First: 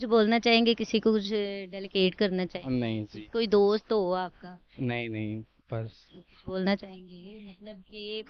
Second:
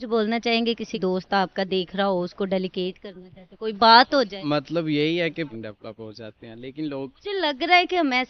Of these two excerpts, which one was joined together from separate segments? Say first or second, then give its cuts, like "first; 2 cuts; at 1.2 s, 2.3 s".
second; 2 cuts; at 1.0 s, 5.5 s